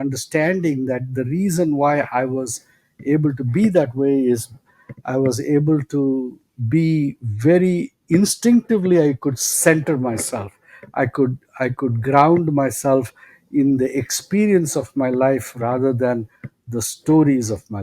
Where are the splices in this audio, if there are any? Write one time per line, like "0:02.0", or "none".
none